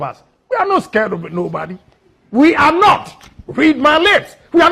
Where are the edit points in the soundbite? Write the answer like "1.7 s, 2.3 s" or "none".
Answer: none